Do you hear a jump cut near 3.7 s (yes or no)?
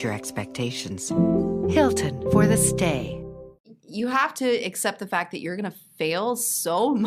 yes